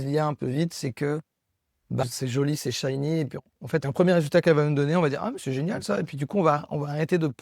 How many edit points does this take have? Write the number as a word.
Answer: one